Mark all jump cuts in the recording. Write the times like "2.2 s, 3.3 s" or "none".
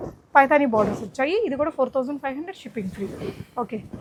none